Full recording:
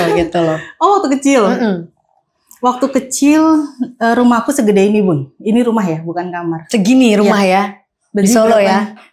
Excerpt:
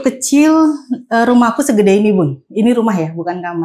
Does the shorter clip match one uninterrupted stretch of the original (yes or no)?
yes